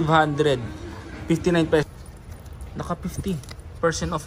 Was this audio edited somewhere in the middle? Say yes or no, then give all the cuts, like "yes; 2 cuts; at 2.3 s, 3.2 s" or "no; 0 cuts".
yes; 1 cut; at 1.9 s